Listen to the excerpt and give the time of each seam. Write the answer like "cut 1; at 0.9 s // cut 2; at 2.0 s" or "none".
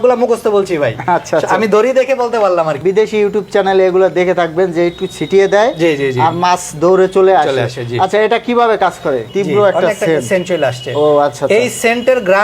cut 1; at 2.8 s // cut 2; at 9.3 s